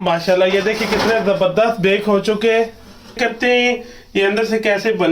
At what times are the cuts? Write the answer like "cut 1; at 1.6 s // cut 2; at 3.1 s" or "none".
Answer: cut 1; at 3.2 s